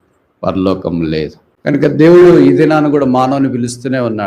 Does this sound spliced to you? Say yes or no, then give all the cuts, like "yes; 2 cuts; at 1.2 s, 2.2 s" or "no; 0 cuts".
yes; 1 cut; at 1.7 s